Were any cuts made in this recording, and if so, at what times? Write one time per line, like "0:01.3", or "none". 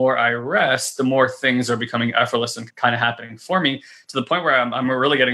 0:02.6